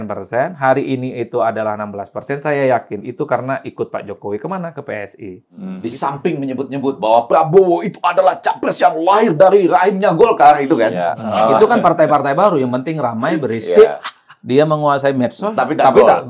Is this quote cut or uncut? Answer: cut